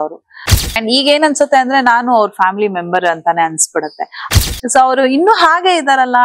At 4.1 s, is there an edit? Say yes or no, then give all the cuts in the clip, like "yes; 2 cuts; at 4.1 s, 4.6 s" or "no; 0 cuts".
yes; 2 cuts; at 0.8 s, 4.1 s